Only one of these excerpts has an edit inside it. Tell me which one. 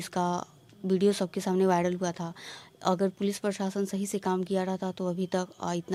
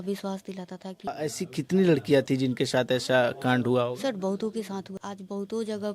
second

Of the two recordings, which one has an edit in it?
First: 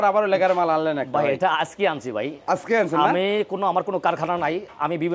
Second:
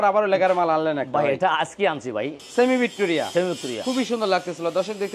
second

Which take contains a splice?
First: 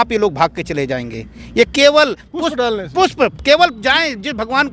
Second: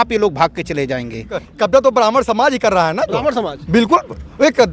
second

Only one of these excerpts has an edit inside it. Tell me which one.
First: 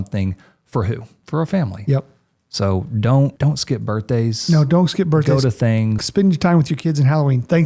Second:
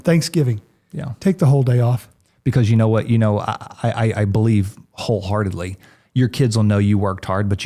first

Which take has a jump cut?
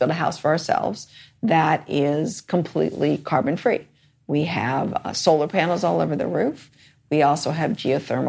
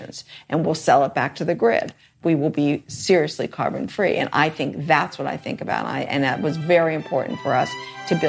second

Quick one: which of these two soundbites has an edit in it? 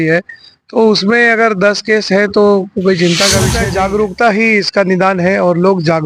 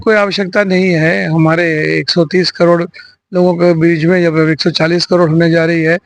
first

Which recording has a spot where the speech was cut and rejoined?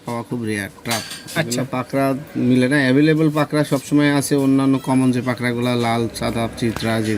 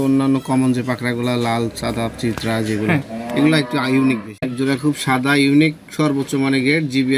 second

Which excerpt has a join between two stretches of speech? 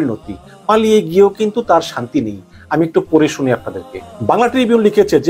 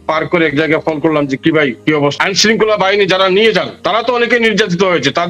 second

